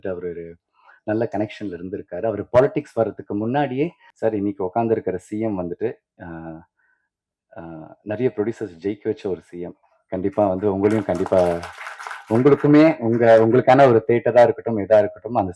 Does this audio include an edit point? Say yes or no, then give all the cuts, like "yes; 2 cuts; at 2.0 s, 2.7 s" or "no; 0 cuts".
yes; 1 cut; at 4.0 s